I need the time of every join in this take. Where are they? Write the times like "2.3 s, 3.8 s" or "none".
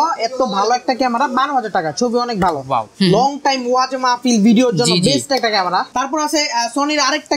2.9 s, 5.9 s